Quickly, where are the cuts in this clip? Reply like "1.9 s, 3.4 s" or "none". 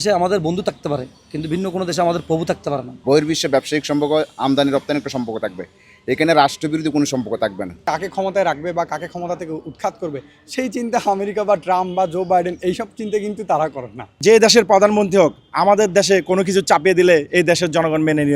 2.9 s, 7.8 s, 14.1 s